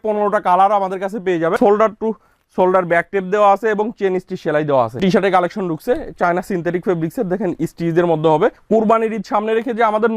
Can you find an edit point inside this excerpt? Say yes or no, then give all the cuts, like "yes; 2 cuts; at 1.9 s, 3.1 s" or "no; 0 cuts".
yes; 3 cuts; at 1.5 s, 4.9 s, 8.6 s